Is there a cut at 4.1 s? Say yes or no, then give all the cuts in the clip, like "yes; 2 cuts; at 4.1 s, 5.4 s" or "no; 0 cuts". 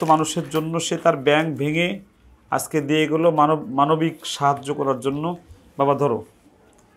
no; 0 cuts